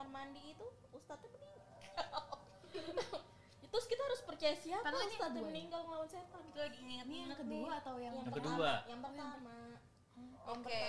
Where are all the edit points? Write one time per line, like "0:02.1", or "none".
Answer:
none